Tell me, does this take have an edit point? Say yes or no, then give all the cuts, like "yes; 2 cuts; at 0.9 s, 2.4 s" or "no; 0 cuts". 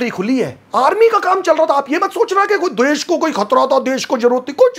no; 0 cuts